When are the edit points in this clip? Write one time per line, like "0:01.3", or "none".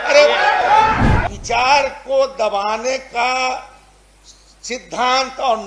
0:01.2